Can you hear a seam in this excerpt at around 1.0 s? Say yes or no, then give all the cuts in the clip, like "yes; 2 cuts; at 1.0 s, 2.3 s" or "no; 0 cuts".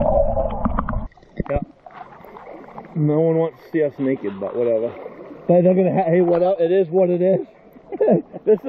yes; 1 cut; at 1.0 s